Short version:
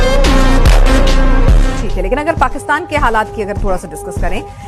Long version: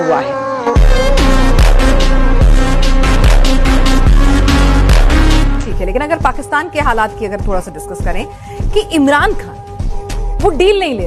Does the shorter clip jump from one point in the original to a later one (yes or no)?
yes